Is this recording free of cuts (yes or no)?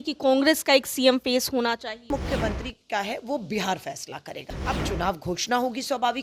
no